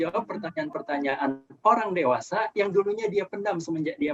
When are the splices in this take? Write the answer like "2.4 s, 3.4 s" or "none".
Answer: none